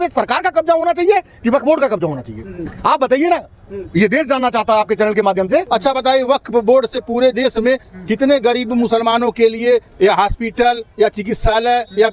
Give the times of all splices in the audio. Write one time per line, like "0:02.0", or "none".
0:05.7